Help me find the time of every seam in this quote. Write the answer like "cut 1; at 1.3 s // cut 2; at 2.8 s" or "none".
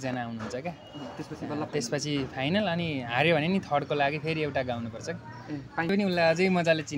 cut 1; at 5.9 s